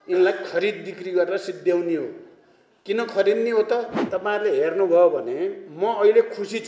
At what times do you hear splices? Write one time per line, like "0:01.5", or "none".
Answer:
0:04.1